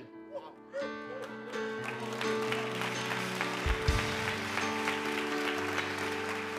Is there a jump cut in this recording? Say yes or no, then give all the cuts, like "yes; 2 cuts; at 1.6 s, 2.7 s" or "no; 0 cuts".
no; 0 cuts